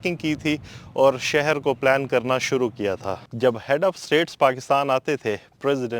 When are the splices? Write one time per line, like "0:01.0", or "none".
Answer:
0:03.2